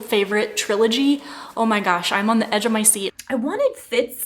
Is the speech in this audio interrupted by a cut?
yes; 1 cut; at 3.2 s

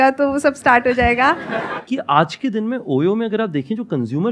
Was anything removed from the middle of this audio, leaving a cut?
yes; 1 cut; at 1.7 s

